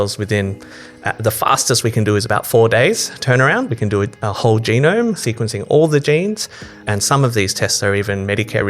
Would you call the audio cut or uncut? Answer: cut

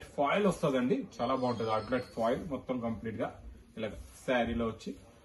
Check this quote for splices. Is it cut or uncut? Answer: uncut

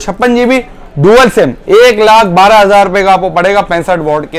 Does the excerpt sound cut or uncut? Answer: uncut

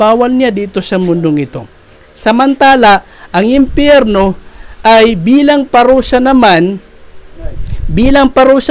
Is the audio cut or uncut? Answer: uncut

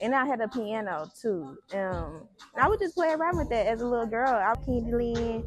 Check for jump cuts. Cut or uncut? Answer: cut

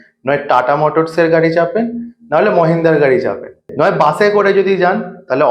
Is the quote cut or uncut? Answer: cut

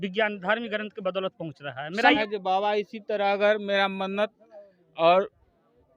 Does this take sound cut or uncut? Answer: cut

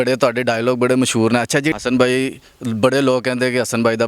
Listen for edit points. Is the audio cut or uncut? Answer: cut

